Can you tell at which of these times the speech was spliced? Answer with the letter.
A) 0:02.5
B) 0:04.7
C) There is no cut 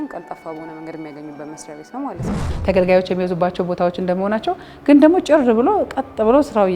A